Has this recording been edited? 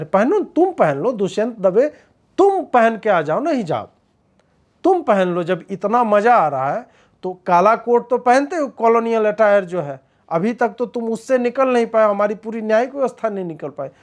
no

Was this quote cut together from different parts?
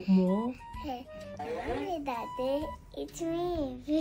no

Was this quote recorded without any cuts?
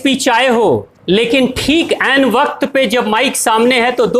no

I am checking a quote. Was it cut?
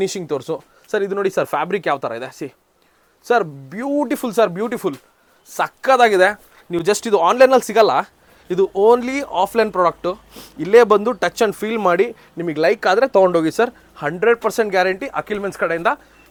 no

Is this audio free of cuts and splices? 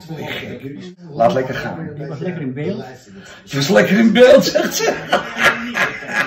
yes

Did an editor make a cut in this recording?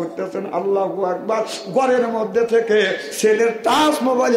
yes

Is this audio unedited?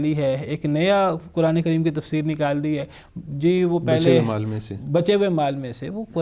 yes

